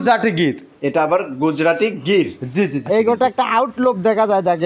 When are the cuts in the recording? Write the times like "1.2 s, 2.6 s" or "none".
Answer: 2.8 s